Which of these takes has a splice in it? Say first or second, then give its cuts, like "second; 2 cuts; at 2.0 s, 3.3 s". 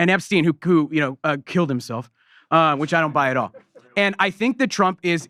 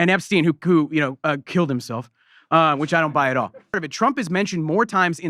second; 1 cut; at 3.8 s